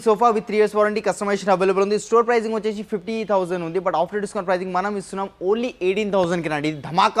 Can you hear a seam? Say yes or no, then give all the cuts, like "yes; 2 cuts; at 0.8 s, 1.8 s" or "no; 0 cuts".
no; 0 cuts